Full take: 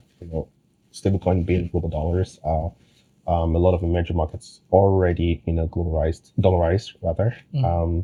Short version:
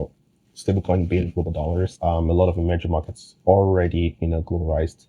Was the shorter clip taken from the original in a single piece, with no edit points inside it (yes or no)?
no